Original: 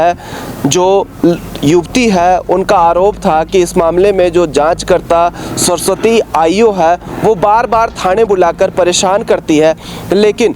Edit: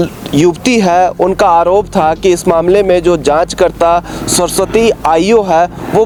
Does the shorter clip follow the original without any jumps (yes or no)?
yes